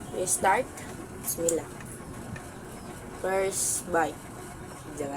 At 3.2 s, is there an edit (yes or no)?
no